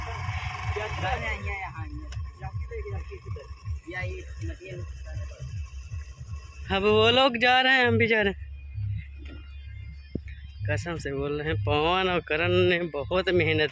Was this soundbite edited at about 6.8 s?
yes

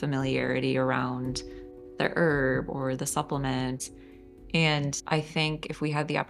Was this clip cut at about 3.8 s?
yes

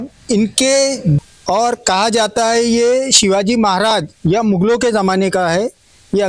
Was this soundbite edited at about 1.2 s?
yes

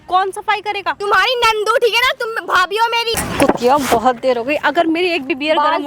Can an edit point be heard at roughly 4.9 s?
no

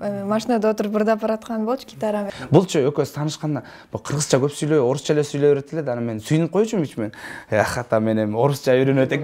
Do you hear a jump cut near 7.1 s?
no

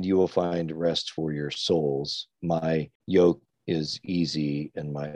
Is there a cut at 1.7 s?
no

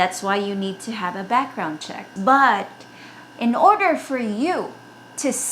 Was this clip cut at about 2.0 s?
yes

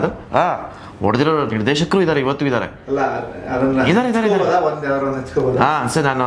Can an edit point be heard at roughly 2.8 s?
no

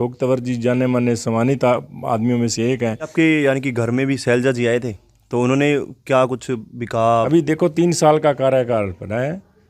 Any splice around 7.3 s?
yes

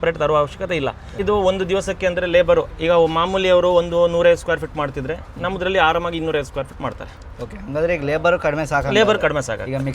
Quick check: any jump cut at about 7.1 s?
no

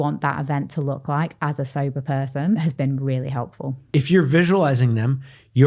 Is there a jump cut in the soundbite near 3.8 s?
yes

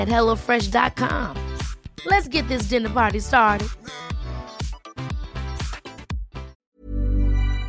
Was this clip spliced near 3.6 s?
no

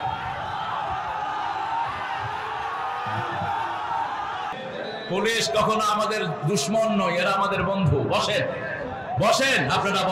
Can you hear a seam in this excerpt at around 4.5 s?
yes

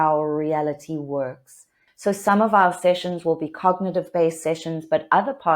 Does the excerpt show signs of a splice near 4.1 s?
no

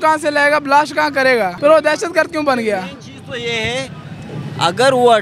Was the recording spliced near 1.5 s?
yes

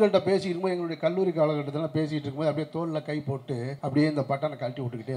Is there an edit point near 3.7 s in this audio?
yes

